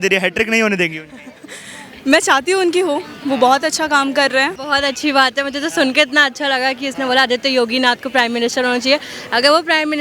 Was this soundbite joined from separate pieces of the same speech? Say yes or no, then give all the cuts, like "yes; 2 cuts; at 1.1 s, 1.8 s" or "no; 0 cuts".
yes; 1 cut; at 4.6 s